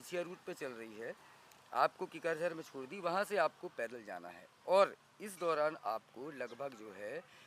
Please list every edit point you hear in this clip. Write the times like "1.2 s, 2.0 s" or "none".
none